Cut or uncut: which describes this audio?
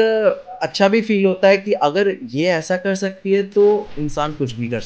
cut